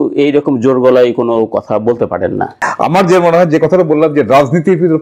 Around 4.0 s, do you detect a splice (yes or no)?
no